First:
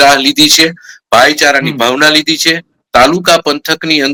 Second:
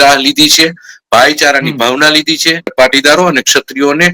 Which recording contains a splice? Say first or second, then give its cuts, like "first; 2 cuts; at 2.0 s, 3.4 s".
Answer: second; 1 cut; at 2.7 s